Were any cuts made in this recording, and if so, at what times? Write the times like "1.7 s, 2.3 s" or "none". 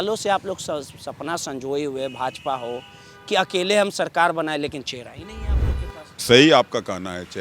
none